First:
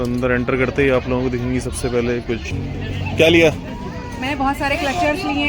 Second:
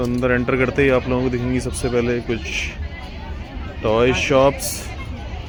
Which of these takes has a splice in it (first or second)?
first